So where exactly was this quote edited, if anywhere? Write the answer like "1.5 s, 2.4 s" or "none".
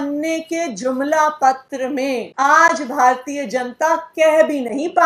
2.3 s